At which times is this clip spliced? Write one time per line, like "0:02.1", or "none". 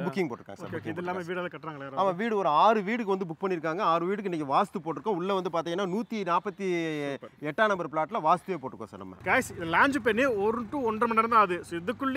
none